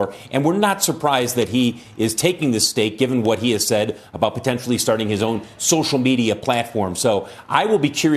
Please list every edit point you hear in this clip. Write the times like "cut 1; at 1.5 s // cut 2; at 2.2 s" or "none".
none